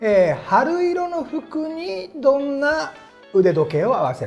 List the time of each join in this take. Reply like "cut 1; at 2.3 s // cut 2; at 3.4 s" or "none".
none